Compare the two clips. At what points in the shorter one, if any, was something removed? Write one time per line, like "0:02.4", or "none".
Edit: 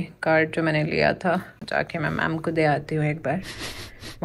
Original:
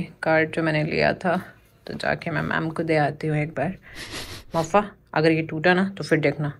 0:01.6